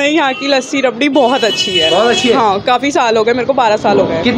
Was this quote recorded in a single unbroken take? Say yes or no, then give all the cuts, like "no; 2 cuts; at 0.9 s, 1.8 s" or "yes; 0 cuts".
yes; 0 cuts